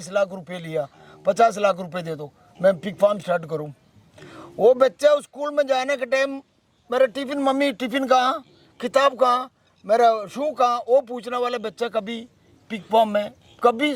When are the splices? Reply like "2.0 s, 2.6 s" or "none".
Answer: none